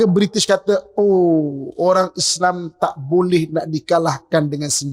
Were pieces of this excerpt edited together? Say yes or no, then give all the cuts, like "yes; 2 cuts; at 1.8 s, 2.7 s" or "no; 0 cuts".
no; 0 cuts